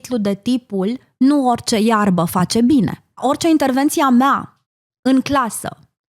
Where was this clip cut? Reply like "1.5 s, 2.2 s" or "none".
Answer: 3.2 s